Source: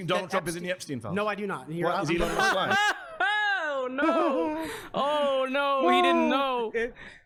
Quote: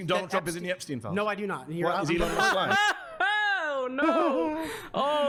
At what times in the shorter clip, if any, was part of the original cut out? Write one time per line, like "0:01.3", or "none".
none